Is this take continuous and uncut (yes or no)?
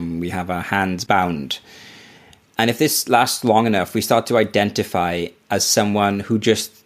no